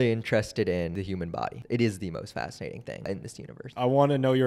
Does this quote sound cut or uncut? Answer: cut